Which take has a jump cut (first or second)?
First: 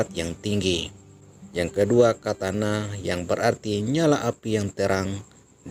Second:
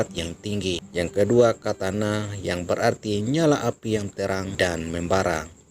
second